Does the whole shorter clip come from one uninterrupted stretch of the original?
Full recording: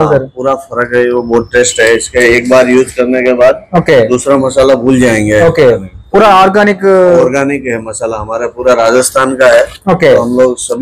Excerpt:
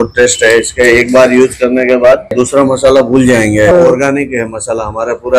no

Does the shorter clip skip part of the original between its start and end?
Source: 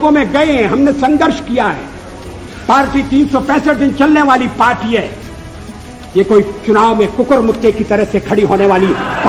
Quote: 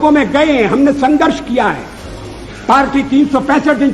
no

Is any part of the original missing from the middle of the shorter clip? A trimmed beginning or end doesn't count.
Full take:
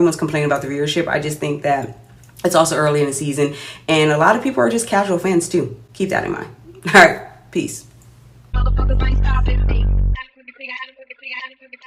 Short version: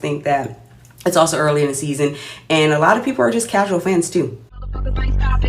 yes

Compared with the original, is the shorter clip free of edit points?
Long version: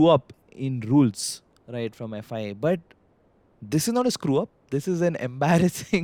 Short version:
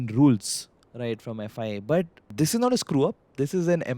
no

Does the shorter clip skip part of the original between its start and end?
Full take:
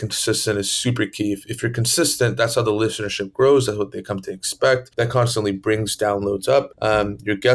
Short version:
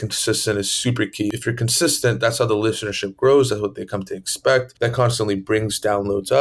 yes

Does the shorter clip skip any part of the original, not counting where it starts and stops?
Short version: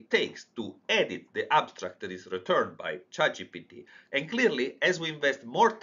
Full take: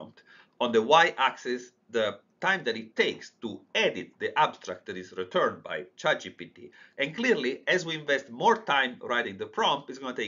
no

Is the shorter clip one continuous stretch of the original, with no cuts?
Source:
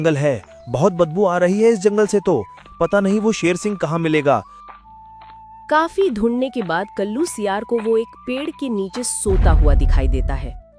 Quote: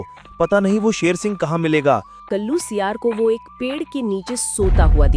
no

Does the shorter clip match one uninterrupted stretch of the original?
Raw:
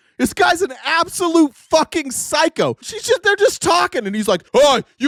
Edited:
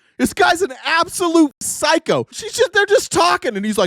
no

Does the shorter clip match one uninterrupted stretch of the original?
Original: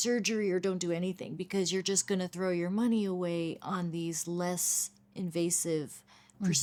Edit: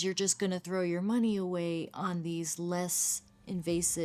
yes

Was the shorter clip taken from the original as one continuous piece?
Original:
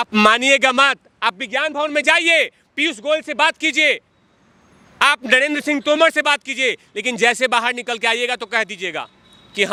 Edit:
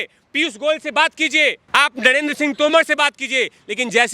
no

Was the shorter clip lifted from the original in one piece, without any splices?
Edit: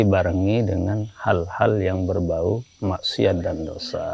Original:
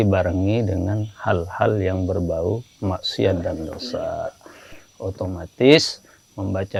yes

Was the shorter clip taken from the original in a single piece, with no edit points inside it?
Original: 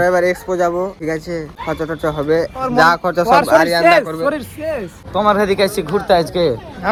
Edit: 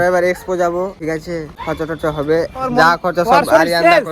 yes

